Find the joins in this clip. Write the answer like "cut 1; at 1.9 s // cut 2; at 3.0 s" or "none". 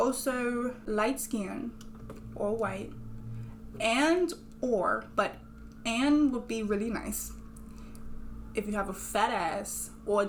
none